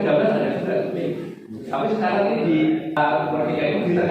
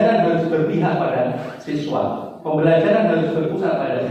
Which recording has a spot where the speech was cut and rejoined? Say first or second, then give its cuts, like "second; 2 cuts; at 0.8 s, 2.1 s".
first; 1 cut; at 3.0 s